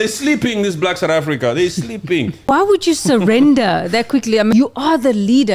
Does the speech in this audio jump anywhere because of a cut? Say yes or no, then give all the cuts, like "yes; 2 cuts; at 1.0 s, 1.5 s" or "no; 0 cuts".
yes; 2 cuts; at 2.5 s, 4.5 s